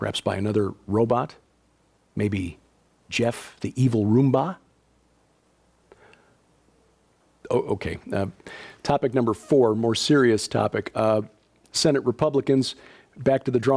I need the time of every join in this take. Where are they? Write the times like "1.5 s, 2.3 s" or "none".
10.0 s